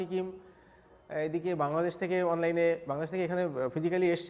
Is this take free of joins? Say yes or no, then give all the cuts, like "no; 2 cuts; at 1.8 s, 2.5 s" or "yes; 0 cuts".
yes; 0 cuts